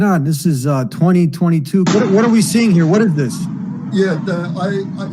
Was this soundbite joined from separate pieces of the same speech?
yes; 1 cut; at 1.9 s

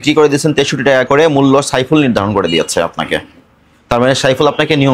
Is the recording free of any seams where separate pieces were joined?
yes; 0 cuts

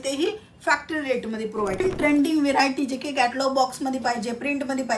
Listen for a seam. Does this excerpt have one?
yes; 1 cut; at 1.8 s

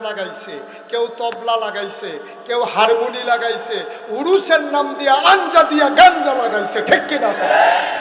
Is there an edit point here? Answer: no; 0 cuts

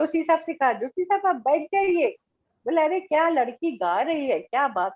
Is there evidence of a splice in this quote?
no; 0 cuts

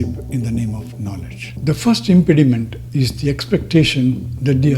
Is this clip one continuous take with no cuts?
no; 1 cut; at 1.4 s

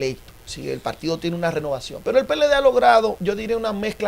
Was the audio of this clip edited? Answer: yes; 2 cuts; at 1.9 s, 3.2 s

